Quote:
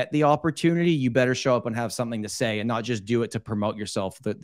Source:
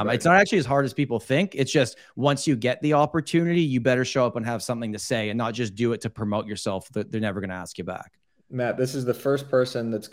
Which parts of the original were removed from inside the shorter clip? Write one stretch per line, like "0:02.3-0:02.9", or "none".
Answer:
none